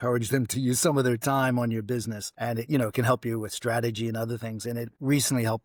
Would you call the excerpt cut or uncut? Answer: uncut